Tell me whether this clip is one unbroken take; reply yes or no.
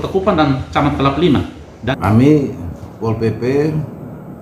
no